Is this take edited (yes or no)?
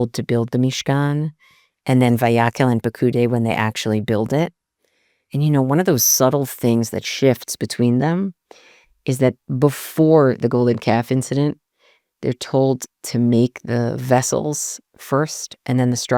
no